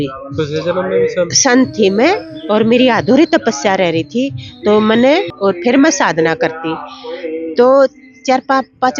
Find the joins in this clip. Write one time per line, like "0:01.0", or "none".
0:05.3